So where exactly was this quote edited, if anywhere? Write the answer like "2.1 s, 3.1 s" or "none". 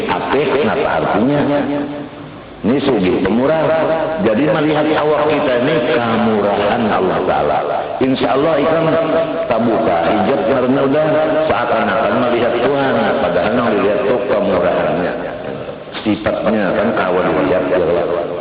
none

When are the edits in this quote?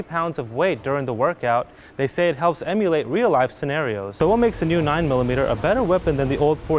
4.2 s

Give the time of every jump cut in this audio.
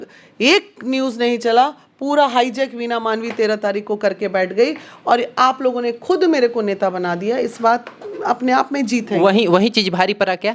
none

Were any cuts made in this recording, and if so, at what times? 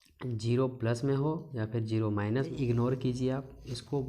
2.5 s

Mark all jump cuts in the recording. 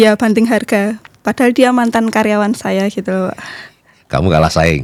none

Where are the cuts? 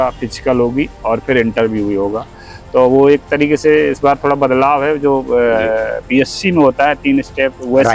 none

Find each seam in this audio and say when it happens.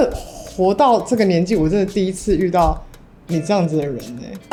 none

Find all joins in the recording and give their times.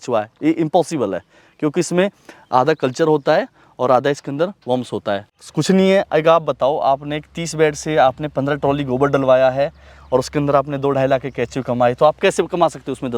5.3 s

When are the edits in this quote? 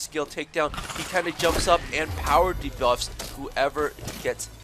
none

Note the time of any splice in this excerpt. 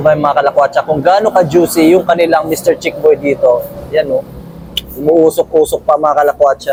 none

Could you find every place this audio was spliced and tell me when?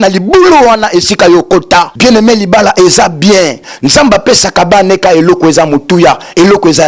1.9 s

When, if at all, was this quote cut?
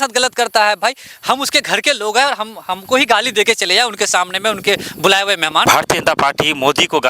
5.6 s

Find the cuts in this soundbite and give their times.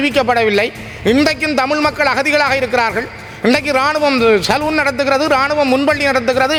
none

